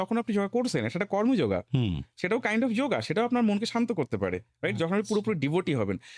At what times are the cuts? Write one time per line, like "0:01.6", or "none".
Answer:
none